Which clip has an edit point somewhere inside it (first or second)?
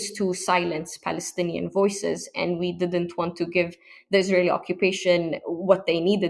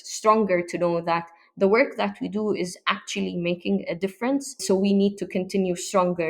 second